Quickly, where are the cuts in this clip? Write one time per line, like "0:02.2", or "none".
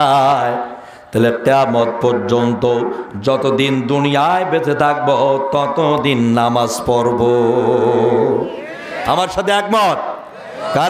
none